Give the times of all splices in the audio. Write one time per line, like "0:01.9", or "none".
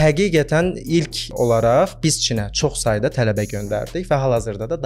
0:01.3